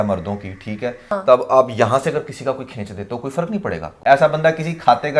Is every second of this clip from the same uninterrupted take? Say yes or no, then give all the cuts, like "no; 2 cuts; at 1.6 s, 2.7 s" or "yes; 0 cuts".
no; 2 cuts; at 1.1 s, 3.9 s